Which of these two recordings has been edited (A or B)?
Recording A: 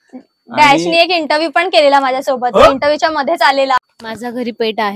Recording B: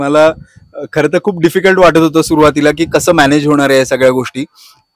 A